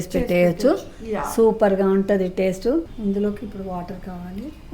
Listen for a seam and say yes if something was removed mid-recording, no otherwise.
yes